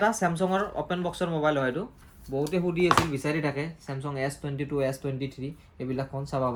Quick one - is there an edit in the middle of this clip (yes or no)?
no